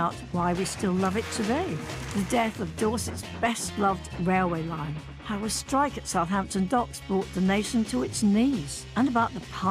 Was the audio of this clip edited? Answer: no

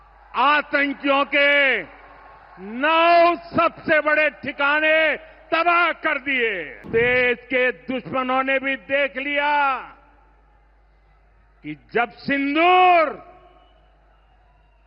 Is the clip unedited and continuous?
no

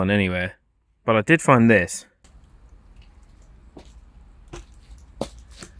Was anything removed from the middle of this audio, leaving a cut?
yes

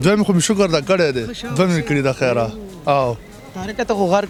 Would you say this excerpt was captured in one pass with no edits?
yes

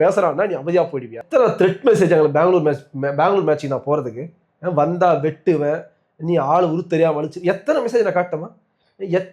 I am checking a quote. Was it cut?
yes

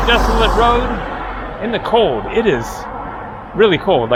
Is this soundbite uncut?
yes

